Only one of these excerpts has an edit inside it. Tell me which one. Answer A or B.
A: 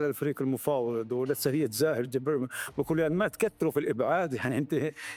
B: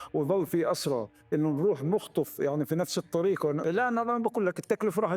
B